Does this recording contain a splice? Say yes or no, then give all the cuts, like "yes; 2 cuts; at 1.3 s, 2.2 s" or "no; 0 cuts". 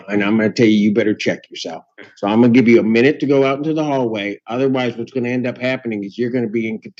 no; 0 cuts